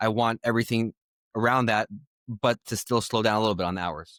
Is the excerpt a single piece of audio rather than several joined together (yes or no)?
yes